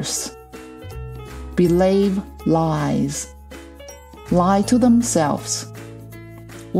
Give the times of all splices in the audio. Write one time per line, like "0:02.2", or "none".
none